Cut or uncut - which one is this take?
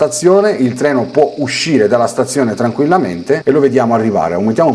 cut